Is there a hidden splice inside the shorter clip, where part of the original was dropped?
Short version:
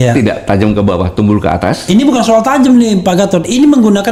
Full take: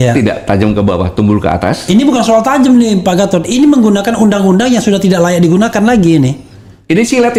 no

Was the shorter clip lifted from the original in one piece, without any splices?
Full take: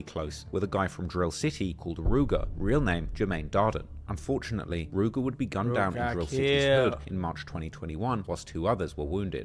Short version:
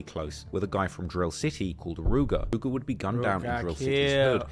no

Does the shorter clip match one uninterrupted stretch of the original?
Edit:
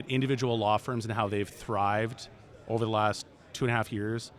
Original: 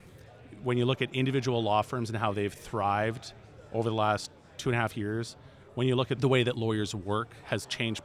yes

